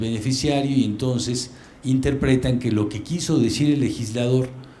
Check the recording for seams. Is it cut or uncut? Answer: uncut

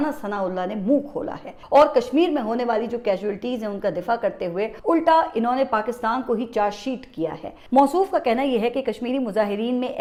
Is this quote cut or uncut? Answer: uncut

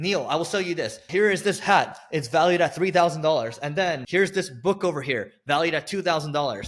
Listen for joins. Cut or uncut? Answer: cut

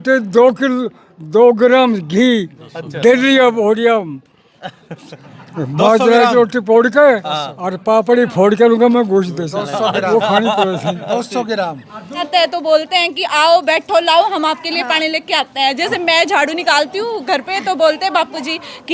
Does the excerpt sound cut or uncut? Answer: cut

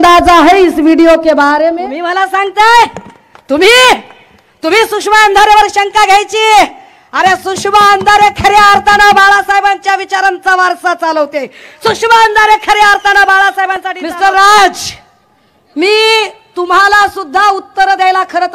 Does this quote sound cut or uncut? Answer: cut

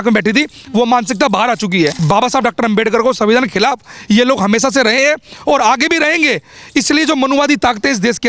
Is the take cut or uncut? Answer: cut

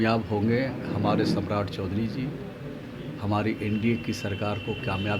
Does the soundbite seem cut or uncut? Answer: uncut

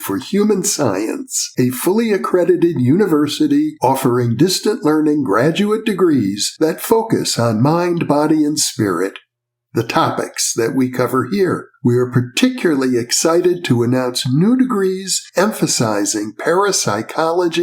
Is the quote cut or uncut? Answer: uncut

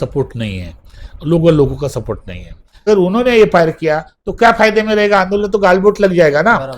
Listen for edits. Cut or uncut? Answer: cut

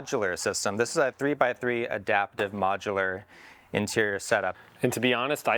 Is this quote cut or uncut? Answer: cut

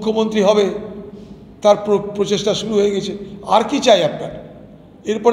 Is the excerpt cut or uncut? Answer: uncut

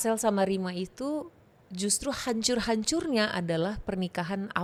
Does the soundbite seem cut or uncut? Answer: uncut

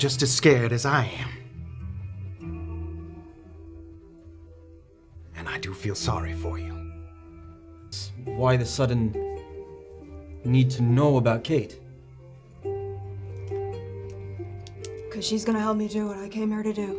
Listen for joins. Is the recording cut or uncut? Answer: cut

